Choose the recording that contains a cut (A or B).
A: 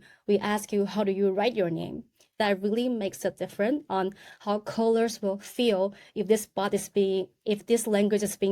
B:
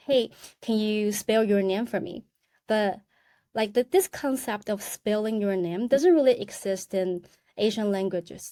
A